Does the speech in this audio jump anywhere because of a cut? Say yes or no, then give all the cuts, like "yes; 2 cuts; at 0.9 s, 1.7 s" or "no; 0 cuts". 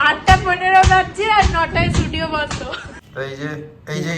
yes; 1 cut; at 3.0 s